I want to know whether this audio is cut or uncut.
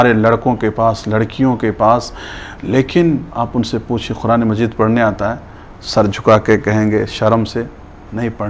uncut